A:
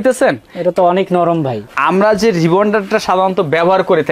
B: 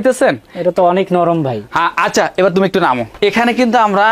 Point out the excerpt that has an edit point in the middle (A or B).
A